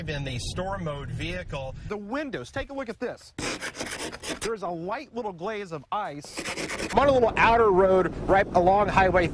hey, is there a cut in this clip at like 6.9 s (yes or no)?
yes